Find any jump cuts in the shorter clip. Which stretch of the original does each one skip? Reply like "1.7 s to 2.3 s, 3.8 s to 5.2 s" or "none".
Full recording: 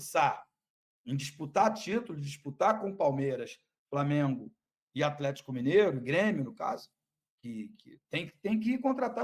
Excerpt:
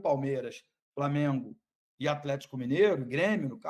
none

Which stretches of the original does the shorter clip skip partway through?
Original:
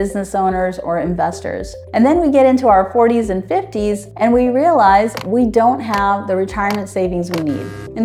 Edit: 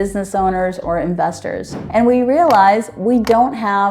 1.8 s to 4.1 s

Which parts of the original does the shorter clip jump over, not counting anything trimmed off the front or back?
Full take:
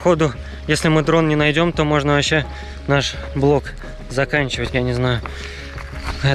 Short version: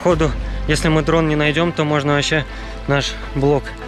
none

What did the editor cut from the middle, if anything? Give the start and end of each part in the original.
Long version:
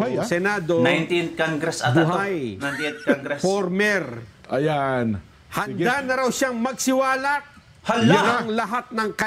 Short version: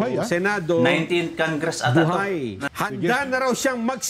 2.6 s to 5.4 s

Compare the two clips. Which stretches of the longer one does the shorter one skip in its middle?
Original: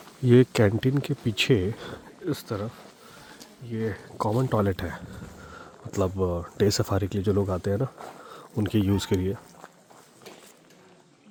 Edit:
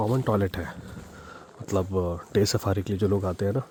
none

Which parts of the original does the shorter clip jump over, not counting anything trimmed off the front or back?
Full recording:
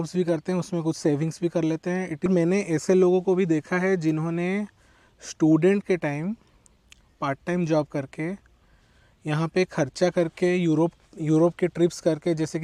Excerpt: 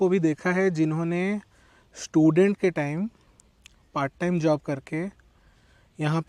none

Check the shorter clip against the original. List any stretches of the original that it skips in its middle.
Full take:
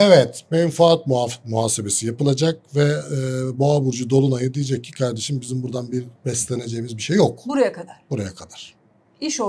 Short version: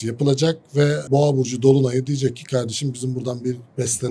3.0 s to 3.5 s

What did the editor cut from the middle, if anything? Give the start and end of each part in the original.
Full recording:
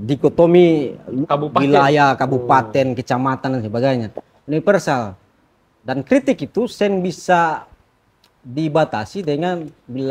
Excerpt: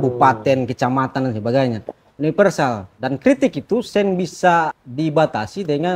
5.2 s to 5.8 s, 7.7 s to 8.4 s

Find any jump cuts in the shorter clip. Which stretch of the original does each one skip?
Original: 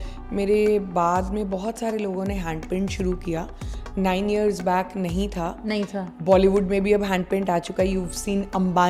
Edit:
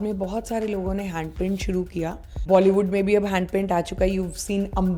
3.7 s to 6.1 s

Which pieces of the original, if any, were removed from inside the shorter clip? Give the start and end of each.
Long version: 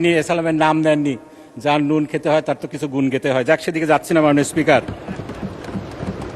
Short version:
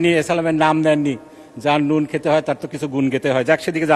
none

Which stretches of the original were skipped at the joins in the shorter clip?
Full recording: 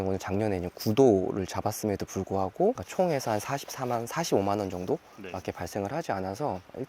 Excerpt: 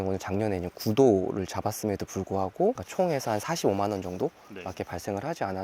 3.4 s to 4.1 s

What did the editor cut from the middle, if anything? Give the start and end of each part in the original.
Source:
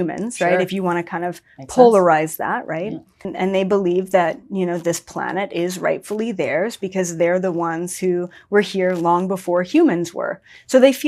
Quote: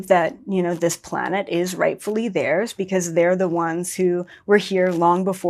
none

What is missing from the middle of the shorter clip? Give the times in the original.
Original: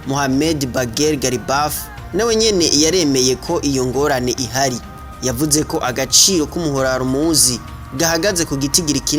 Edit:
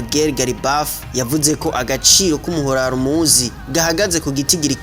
1.9 s to 5.1 s, 7.6 s to 7.8 s

